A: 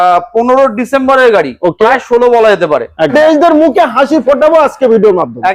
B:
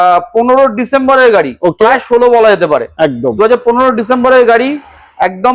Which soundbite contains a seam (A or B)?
A